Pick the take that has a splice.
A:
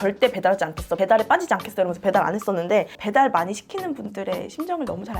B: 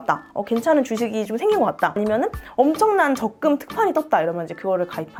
A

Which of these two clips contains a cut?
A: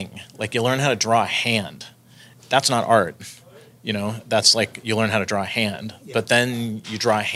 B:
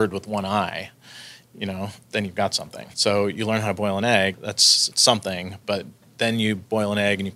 B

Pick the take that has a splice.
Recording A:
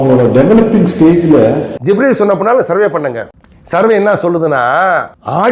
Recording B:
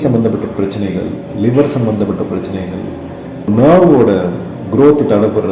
A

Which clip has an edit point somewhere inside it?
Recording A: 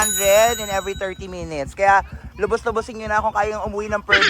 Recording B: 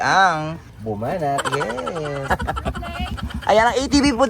B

